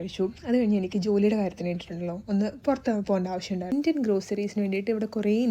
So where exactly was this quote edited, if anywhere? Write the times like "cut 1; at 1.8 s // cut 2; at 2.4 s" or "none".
cut 1; at 3.7 s